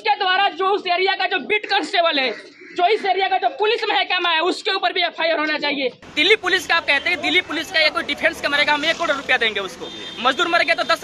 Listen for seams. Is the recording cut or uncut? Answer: cut